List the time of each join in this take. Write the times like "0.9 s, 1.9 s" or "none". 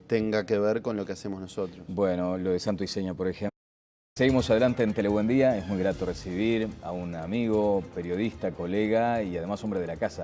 none